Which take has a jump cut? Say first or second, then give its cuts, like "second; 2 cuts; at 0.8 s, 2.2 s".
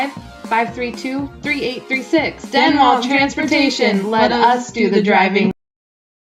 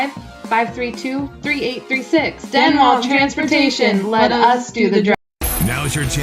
second; 1 cut; at 5.1 s